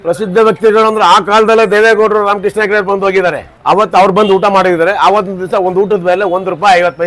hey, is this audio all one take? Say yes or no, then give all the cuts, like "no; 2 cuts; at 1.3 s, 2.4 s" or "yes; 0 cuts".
yes; 0 cuts